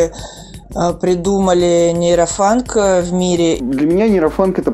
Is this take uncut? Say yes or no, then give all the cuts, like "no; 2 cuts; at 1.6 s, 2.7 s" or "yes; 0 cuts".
no; 1 cut; at 3.6 s